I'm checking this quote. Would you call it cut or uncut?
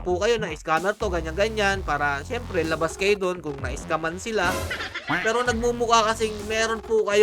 uncut